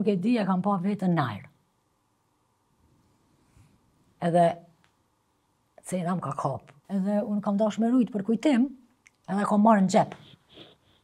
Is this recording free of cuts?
no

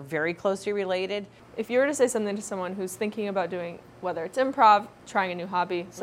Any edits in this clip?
yes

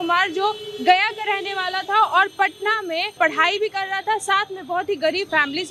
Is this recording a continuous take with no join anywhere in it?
yes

